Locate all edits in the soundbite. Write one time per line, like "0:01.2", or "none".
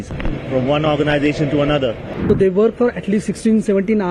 0:02.1